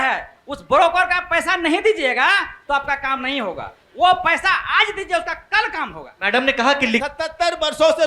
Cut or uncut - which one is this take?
cut